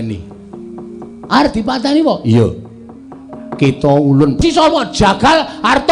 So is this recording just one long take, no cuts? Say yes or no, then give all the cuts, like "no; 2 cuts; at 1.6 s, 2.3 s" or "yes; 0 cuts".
no; 1 cut; at 4.4 s